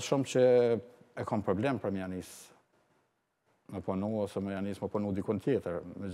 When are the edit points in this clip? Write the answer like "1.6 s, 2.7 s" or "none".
none